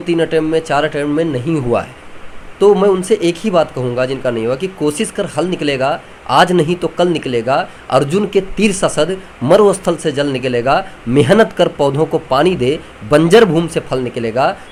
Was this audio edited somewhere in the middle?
no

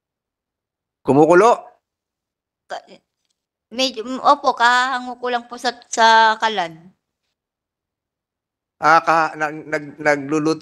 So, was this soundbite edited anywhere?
no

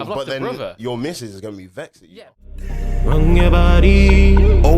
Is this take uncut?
no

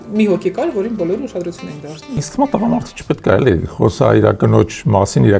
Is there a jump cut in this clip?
yes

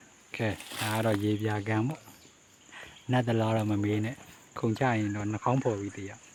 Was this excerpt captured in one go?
yes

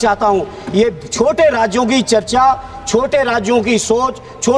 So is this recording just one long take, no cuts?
yes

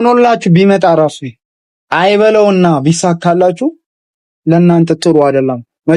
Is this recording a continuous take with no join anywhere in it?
yes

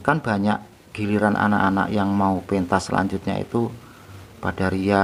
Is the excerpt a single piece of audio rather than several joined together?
yes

